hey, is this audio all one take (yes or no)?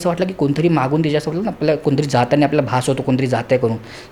yes